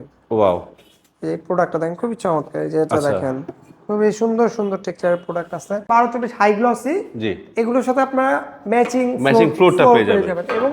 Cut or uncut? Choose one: cut